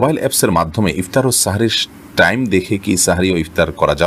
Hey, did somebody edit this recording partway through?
no; 0 cuts

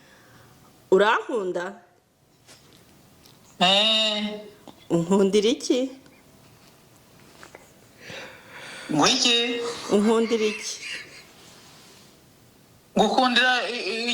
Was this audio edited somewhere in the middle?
no; 0 cuts

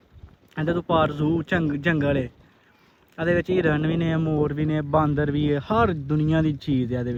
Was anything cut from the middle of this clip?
no; 0 cuts

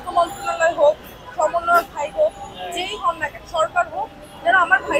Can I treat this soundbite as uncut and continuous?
yes; 0 cuts

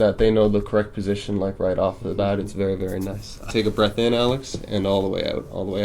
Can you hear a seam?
yes; 1 cut; at 3.5 s

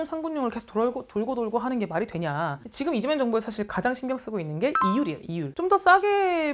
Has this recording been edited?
no; 0 cuts

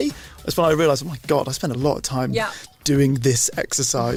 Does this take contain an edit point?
no; 0 cuts

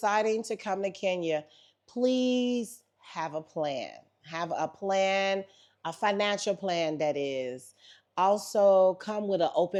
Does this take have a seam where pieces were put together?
no; 0 cuts

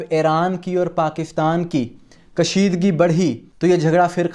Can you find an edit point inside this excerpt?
no; 0 cuts

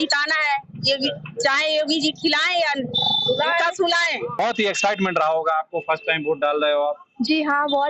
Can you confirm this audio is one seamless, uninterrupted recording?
no; 1 cut; at 4.4 s

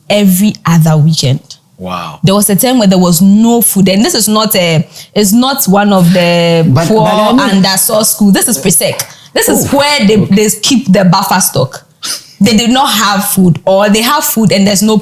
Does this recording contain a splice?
no; 0 cuts

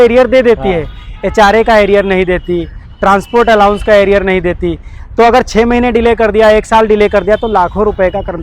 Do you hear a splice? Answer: no; 0 cuts

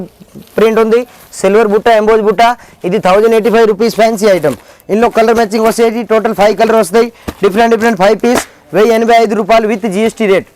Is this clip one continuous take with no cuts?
yes; 0 cuts

